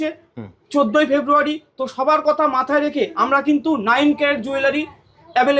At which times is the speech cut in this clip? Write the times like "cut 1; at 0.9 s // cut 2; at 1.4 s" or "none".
none